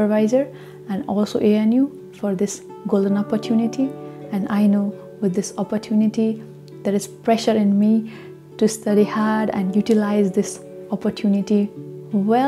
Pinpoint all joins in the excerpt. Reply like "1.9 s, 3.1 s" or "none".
none